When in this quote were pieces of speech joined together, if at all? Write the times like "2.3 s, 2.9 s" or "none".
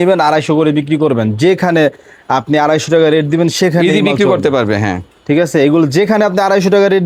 none